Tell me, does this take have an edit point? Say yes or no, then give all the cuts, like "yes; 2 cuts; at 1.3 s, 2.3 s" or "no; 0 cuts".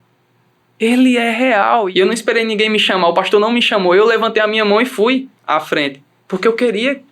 yes; 1 cut; at 1.9 s